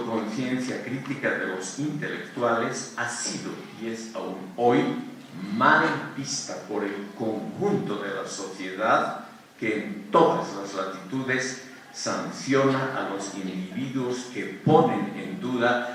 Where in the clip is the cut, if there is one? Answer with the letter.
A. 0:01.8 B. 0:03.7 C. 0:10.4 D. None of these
D